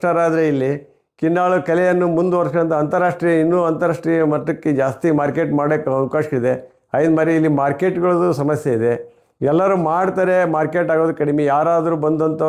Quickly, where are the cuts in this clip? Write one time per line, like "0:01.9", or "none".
none

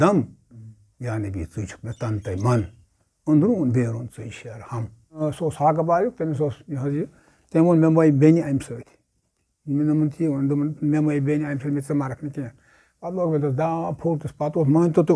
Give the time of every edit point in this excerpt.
0:05.2

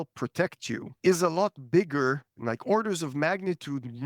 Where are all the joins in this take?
0:00.9
0:02.3

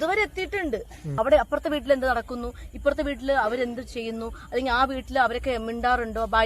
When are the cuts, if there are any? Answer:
0:01.0

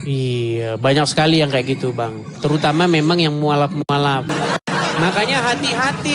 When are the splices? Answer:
0:04.3

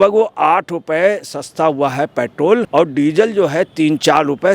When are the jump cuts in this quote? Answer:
0:02.7

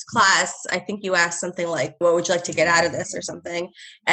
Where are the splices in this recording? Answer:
0:02.0

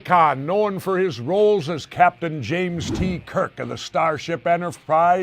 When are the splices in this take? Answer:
0:01.7

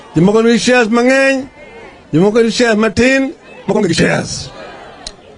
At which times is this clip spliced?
0:03.9

